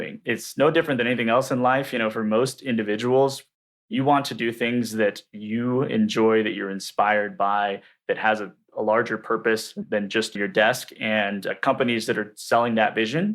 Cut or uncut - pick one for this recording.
cut